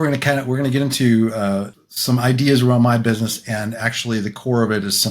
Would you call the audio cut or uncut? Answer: cut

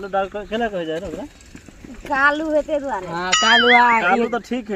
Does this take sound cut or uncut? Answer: uncut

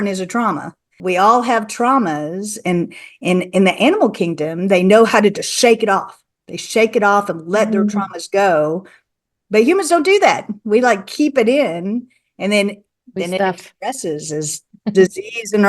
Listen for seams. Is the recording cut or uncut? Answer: cut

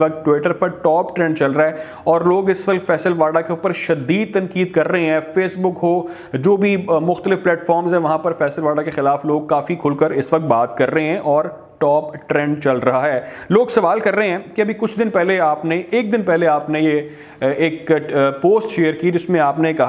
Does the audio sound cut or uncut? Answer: uncut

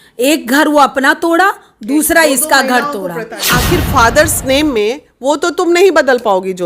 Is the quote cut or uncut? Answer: cut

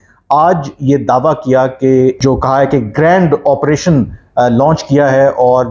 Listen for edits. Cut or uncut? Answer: cut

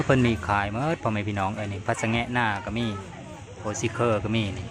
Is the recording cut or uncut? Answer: uncut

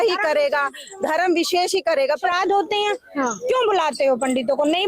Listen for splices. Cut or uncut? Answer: cut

